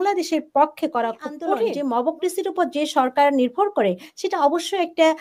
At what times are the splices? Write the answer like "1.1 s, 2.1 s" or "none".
1.7 s

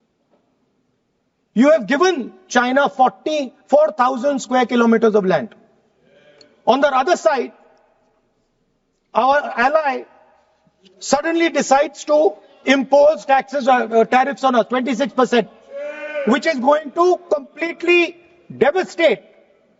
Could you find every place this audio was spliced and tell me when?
none

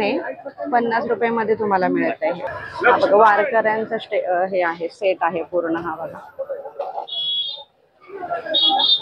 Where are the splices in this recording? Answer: 2.5 s

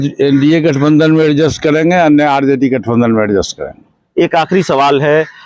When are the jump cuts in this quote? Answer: none

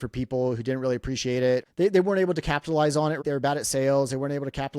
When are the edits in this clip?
1.7 s, 3.2 s

